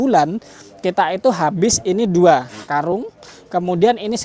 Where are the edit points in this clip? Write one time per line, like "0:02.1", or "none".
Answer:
none

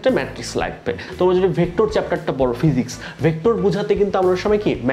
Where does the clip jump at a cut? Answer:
0:01.1

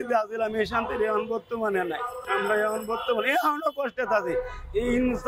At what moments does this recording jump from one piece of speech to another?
0:02.1

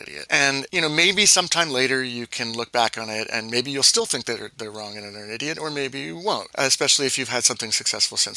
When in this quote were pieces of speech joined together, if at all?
none

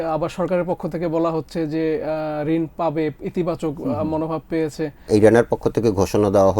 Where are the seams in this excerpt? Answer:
0:05.1

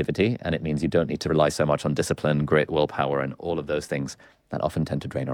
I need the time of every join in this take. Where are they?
0:01.2

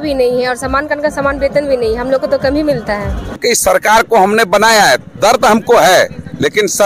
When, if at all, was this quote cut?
0:03.4

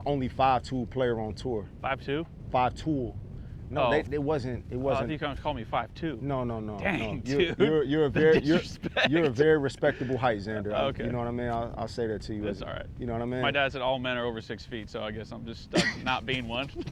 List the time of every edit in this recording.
0:01.7

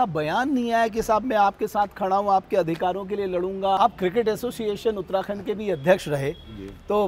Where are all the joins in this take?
0:03.8

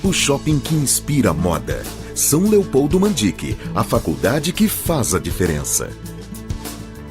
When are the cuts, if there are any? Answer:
0:05.9

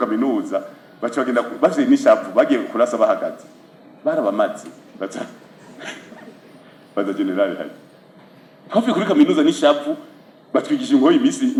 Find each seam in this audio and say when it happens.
none

